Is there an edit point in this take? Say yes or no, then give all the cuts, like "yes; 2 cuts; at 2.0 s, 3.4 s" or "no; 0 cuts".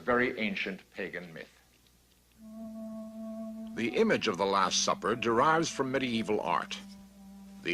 no; 0 cuts